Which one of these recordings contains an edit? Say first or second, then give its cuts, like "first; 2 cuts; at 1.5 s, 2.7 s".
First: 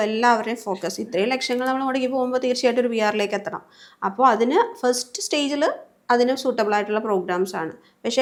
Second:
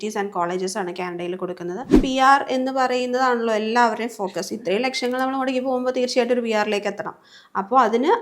second; 1 cut; at 1.9 s